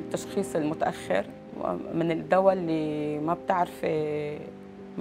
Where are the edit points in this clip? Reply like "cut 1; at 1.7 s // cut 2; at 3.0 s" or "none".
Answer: cut 1; at 1.4 s